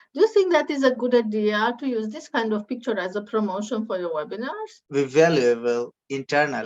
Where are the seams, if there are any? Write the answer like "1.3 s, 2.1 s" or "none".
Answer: 4.7 s